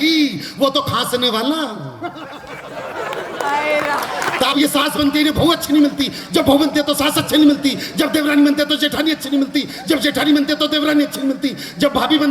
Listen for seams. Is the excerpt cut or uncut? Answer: cut